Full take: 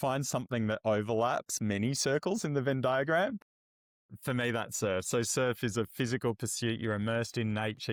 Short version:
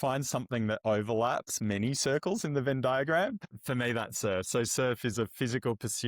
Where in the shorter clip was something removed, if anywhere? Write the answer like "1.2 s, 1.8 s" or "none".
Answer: 3.5 s